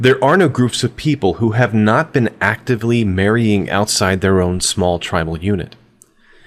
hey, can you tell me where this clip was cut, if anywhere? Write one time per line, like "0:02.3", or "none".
none